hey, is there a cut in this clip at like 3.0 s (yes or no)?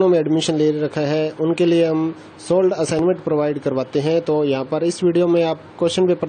yes